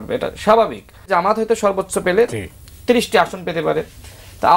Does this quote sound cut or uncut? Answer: cut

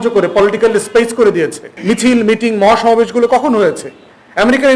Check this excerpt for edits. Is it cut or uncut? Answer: cut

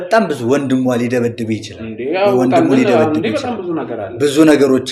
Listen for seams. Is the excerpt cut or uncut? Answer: uncut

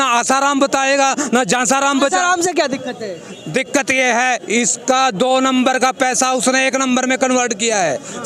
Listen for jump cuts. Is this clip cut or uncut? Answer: uncut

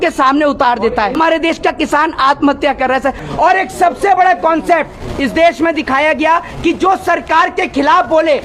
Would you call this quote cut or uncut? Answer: cut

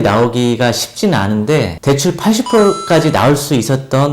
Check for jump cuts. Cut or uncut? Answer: cut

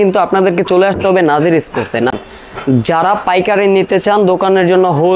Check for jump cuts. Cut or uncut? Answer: cut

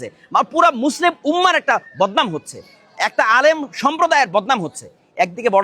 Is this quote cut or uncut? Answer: uncut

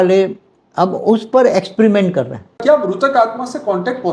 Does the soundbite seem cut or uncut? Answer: cut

